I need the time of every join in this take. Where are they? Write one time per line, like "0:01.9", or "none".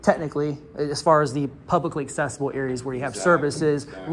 none